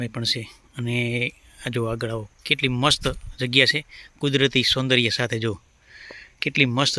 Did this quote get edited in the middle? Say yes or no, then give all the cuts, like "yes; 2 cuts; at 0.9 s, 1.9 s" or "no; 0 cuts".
no; 0 cuts